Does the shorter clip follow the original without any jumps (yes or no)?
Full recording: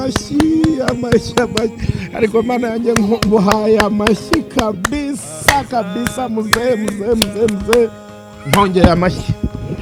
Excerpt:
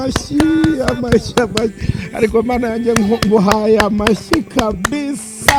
yes